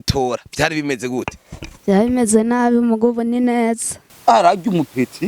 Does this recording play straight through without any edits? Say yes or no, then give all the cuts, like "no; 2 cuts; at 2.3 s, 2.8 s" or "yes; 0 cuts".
no; 1 cut; at 3.9 s